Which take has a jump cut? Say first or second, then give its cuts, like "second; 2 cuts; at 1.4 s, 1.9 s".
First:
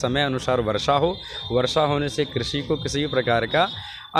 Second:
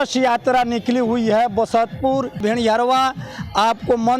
second; 1 cut; at 2.4 s